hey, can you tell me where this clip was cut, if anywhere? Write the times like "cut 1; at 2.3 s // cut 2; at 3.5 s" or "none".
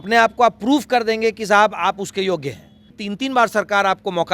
cut 1; at 3.0 s

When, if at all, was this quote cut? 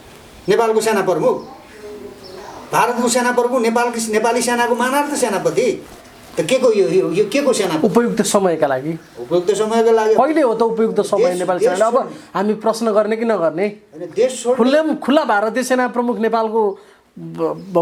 none

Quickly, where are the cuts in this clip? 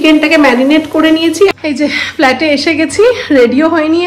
cut 1; at 1.5 s

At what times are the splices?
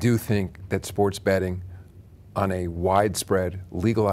none

